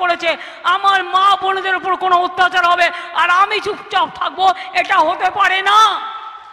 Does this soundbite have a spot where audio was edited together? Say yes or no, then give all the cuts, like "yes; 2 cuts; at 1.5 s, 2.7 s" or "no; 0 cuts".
no; 0 cuts